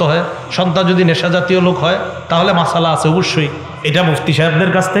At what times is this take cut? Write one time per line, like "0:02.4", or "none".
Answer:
none